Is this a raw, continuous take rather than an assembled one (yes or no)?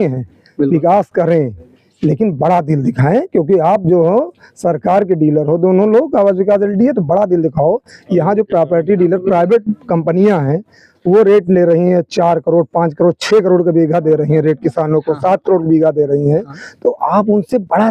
yes